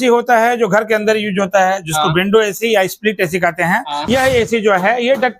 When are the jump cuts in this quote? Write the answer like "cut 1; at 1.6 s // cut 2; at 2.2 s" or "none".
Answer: cut 1; at 3.9 s

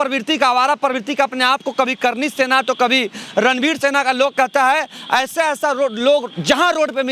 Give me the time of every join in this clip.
none

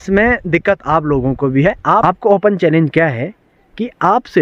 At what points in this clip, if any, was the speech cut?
cut 1; at 2.0 s

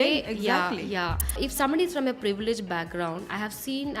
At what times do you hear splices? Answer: cut 1; at 1.4 s

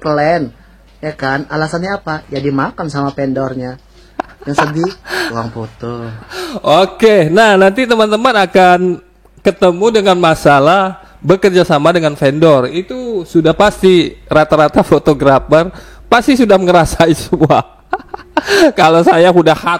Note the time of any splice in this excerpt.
cut 1; at 6.3 s

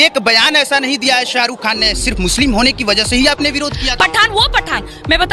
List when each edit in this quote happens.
cut 1; at 3.8 s

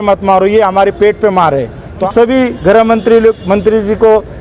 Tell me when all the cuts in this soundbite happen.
cut 1; at 2.0 s

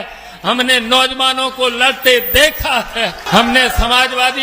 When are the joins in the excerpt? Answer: cut 1; at 3.2 s

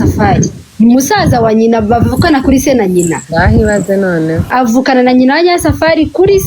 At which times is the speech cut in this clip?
cut 1; at 4.5 s

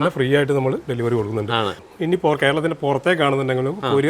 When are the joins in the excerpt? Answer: cut 1; at 1.8 s

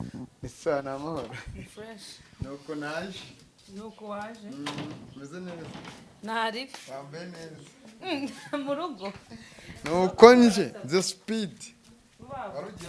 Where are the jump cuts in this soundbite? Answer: none

